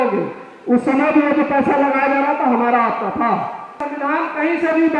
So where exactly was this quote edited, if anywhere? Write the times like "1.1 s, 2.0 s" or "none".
3.8 s